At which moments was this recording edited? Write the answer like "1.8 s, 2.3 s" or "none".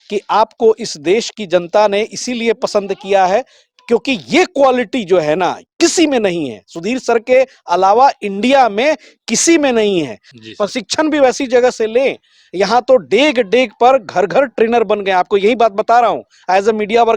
10.2 s